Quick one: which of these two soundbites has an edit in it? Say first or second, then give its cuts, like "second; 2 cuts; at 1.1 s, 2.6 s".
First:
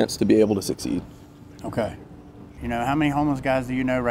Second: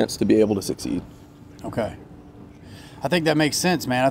first; 1 cut; at 2.5 s